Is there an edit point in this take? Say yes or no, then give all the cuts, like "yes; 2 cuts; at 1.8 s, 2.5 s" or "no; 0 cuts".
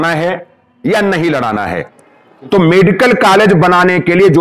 yes; 1 cut; at 2.0 s